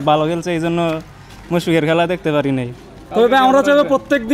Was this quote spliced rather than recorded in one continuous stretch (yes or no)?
no